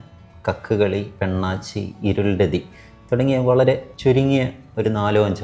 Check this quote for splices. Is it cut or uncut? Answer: cut